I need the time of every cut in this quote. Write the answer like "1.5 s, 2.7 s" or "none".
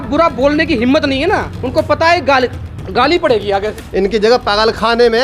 3.8 s